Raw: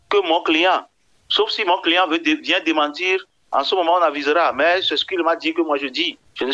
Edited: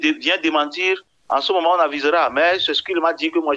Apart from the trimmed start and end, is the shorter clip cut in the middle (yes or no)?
no